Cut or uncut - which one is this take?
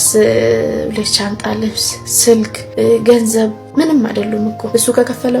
cut